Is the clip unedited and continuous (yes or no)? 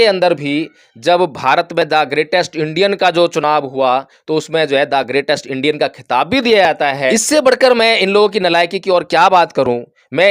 no